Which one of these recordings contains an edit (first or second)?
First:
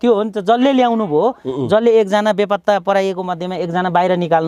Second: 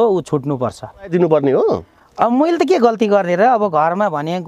second